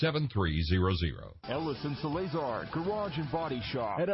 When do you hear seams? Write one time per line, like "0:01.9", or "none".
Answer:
0:01.3